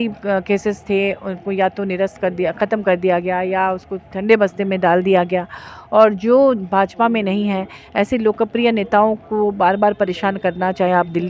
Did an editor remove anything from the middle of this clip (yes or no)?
no